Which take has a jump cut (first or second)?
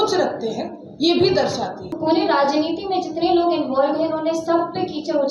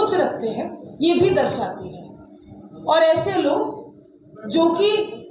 first